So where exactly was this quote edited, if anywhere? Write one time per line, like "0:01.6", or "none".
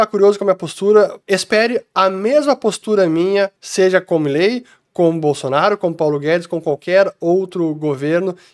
0:01.2
0:03.6